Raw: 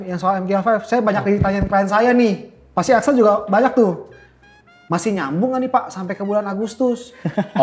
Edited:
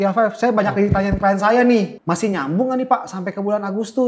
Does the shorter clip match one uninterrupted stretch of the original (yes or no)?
no